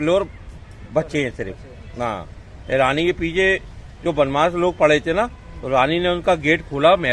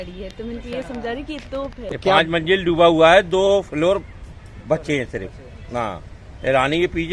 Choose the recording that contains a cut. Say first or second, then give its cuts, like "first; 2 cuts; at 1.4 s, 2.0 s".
second; 1 cut; at 1.9 s